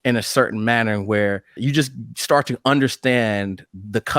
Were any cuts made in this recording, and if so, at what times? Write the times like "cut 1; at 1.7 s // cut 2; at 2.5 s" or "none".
cut 1; at 1.5 s